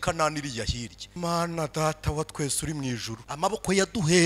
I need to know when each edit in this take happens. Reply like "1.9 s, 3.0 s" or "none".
1.0 s, 3.2 s